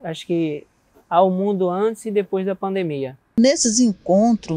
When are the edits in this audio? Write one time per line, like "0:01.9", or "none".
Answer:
0:03.3